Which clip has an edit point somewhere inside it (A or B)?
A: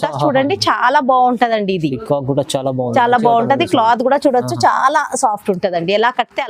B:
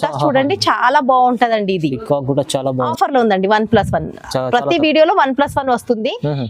B